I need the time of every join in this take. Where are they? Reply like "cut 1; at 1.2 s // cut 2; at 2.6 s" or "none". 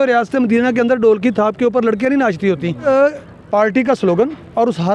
cut 1; at 2.8 s